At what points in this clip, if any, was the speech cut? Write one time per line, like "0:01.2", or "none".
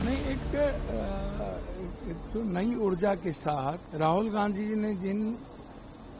0:03.8